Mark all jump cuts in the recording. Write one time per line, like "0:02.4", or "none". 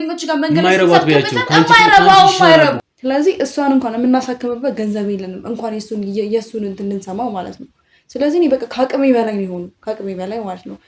0:02.9